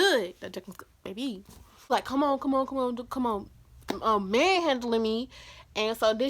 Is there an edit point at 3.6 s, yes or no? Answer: no